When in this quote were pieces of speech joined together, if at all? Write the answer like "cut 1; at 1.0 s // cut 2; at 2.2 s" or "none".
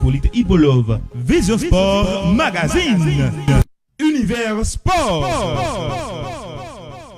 cut 1; at 3.6 s